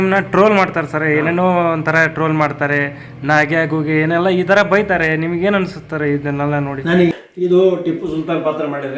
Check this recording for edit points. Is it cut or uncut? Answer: cut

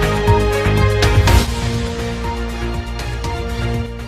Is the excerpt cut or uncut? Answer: cut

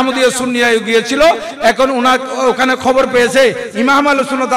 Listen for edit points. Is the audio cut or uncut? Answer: uncut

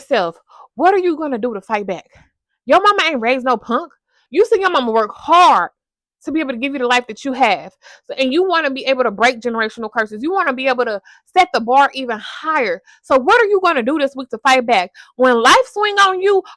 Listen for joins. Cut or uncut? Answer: cut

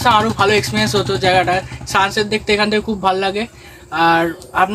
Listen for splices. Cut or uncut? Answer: uncut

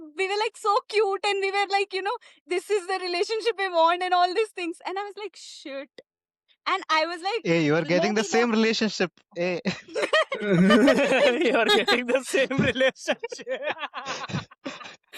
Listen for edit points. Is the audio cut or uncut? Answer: uncut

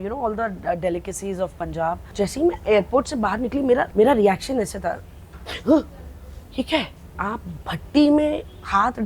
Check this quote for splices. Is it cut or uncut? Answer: cut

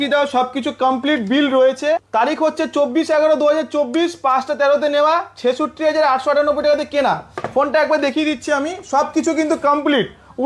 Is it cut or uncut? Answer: cut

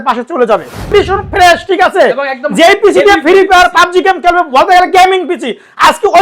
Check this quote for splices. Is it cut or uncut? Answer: cut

